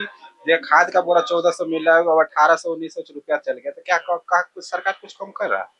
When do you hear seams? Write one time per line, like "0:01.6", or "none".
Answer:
none